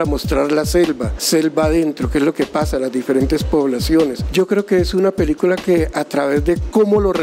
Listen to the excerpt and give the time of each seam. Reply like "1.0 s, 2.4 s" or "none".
1.1 s, 4.2 s